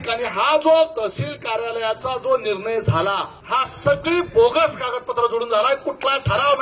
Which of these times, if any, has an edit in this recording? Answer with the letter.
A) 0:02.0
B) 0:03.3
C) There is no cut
B